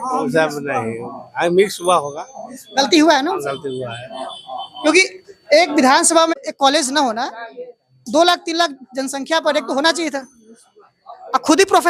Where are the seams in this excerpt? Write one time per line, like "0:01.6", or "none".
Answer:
0:06.3